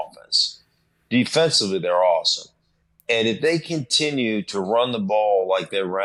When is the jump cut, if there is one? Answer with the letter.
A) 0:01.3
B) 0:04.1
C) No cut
C